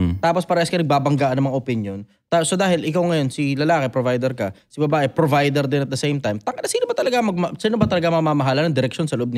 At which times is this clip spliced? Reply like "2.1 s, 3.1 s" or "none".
none